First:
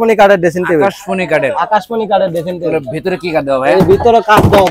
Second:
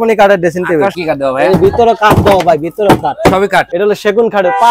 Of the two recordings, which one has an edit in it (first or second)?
second